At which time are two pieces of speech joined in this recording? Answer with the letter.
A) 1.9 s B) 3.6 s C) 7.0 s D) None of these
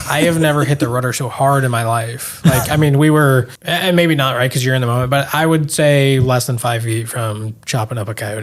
B